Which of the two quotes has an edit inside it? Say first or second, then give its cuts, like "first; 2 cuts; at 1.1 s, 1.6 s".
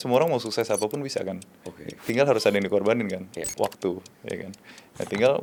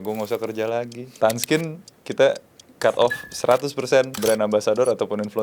second; 2 cuts; at 1.2 s, 4.2 s